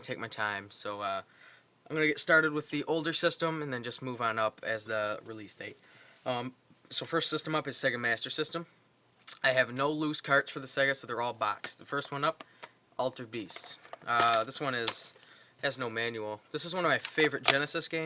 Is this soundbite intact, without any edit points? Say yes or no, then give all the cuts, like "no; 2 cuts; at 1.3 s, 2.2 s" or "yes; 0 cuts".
no; 1 cut; at 3.2 s